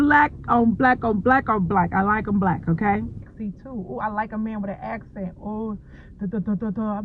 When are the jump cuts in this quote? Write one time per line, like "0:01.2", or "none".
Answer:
0:03.3

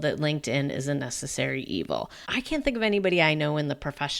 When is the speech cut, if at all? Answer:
0:02.2

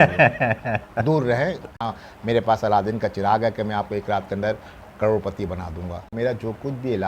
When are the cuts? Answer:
0:01.8
0:06.1

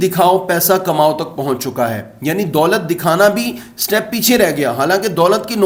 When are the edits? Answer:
none

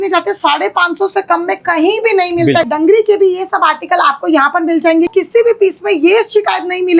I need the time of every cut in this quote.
0:02.7
0:05.1

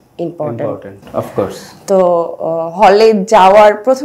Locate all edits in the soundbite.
none

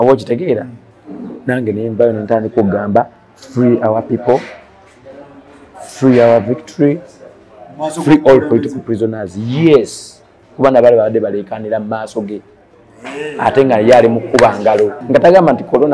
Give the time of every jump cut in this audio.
0:15.0

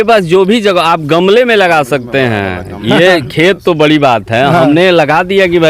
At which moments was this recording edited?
none

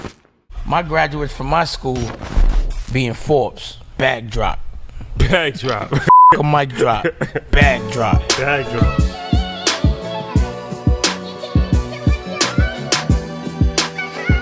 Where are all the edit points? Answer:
none

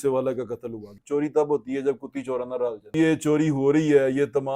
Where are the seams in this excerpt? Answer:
0:01.0
0:02.9

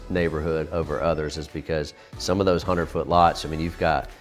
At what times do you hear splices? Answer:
none

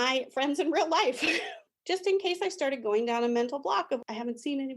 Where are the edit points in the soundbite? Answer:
0:01.6

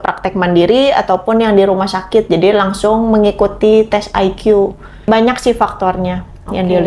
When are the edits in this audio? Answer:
0:05.1

